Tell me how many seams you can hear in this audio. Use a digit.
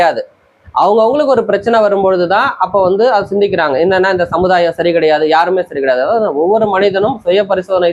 0